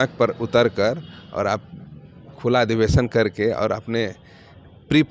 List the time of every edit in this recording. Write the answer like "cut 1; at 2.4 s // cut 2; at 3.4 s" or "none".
none